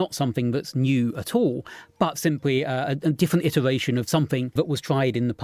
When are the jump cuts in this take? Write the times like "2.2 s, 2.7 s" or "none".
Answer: 4.5 s